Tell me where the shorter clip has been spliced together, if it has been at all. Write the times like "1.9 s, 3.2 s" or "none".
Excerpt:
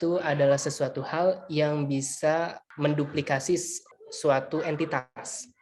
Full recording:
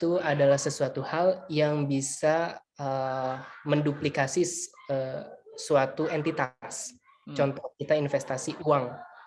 2.6 s, 3.8 s